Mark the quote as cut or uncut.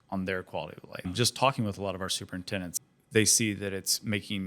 cut